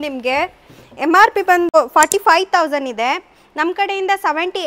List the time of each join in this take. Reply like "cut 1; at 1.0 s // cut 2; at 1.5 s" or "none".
cut 1; at 1.7 s